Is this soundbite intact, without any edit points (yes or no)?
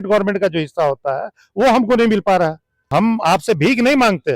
no